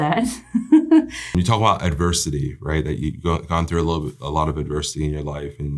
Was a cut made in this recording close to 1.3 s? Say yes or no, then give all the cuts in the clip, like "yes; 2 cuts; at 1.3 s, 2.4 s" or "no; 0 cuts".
yes; 1 cut; at 1.3 s